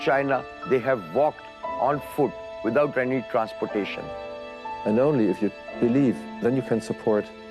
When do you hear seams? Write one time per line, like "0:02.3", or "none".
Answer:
0:04.6